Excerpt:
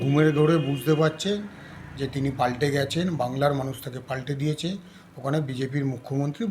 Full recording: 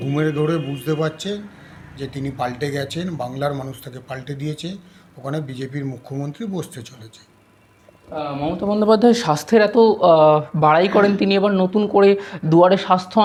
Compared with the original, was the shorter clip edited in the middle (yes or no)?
no